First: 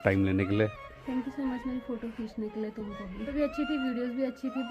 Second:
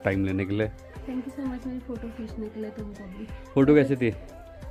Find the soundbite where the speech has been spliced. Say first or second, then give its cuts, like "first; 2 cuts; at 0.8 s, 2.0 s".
first; 1 cut; at 3.3 s